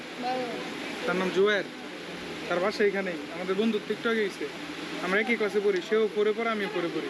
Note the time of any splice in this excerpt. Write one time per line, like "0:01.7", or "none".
none